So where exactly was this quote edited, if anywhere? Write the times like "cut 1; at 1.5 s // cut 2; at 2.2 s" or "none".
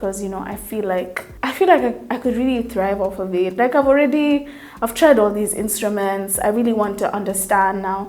cut 1; at 1.2 s

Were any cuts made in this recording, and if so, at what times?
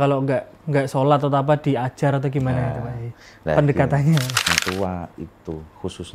cut 1; at 4.5 s

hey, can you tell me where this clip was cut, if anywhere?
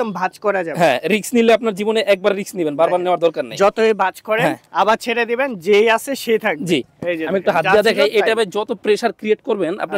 none

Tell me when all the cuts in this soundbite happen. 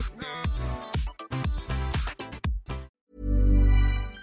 cut 1; at 3.0 s

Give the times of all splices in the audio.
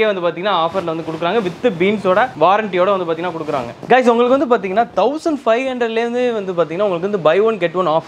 none

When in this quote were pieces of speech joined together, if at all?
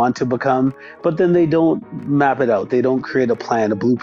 cut 1; at 1.9 s

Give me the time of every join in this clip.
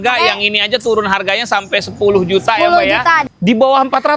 cut 1; at 3.3 s

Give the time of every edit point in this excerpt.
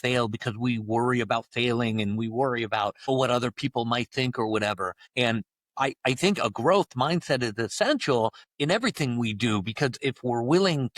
cut 1; at 3.1 s // cut 2; at 5.0 s // cut 3; at 8.4 s

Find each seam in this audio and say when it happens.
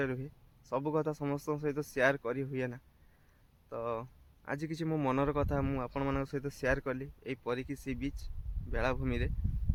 none

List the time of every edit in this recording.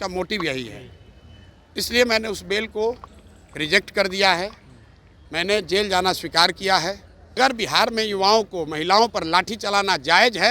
cut 1; at 7.4 s

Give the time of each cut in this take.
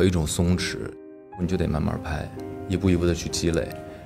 cut 1; at 1.4 s

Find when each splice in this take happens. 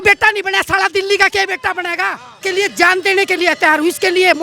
cut 1; at 2.4 s

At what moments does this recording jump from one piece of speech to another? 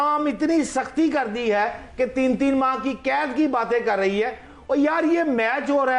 none

